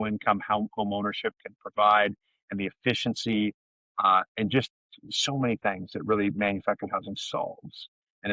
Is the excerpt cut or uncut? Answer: uncut